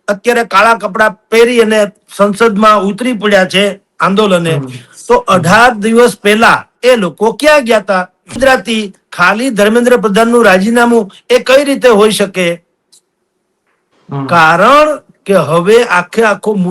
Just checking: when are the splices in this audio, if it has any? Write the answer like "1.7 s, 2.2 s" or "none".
8.4 s